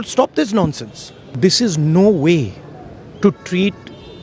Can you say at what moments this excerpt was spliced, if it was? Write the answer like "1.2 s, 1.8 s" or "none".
1.3 s